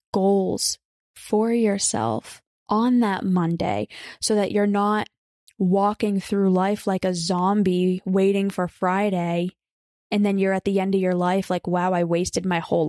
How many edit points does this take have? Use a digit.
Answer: 0